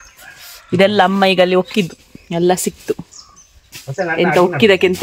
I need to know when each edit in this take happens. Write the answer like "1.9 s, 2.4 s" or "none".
none